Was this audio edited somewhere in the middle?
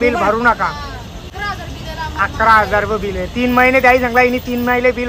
yes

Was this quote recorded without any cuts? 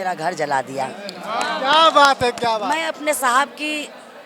no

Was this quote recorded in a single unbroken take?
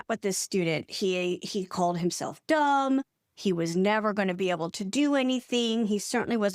yes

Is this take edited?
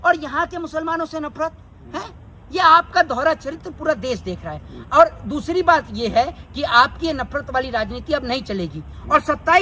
no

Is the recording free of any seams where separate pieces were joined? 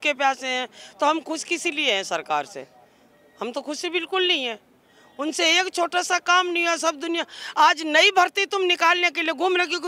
yes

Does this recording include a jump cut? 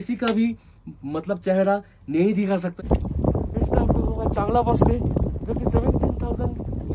yes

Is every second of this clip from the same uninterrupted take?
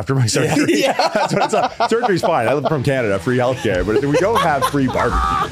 yes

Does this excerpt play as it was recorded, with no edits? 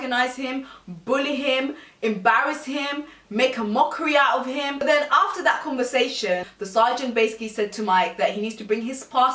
yes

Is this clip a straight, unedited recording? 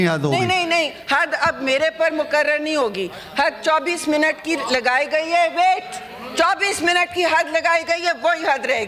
yes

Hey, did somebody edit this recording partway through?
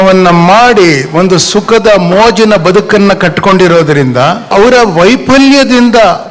yes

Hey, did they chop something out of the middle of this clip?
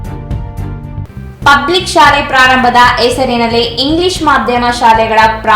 yes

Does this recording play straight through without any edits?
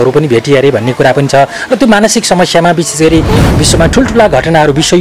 no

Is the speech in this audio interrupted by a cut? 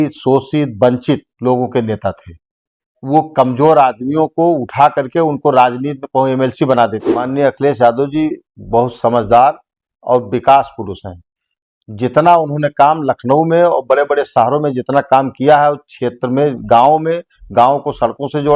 yes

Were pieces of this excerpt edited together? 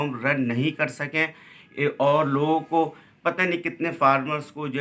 no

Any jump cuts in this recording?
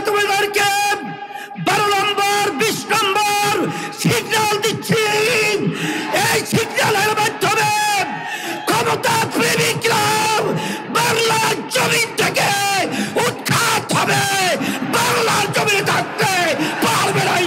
no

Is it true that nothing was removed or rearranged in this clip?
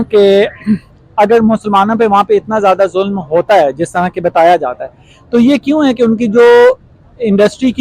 yes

